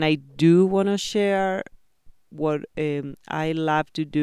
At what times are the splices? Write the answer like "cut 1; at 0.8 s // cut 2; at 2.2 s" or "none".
none